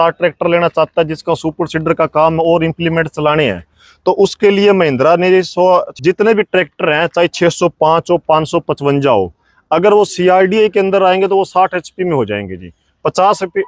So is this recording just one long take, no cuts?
no; 1 cut; at 6.0 s

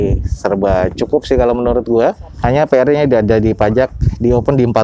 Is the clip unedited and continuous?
yes; 0 cuts

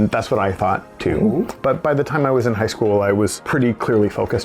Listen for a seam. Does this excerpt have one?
yes; 2 cuts; at 1.6 s, 3.4 s

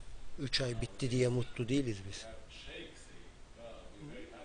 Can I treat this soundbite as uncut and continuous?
no; 1 cut; at 3.4 s

